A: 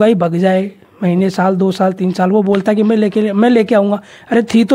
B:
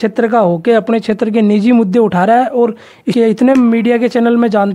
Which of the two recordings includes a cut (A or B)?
B